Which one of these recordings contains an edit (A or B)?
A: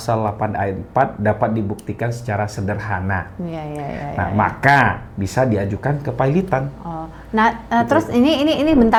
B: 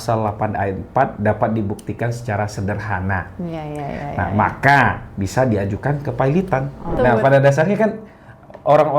B